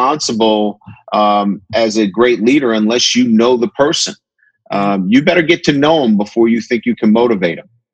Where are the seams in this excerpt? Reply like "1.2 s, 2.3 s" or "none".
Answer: none